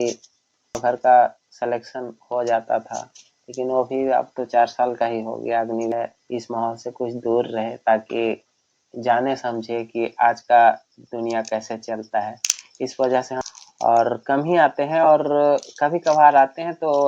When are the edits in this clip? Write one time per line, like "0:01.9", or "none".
0:00.8
0:05.9
0:13.3